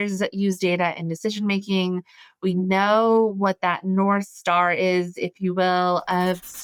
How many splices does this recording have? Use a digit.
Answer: 0